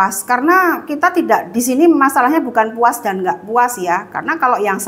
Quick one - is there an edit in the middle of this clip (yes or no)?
no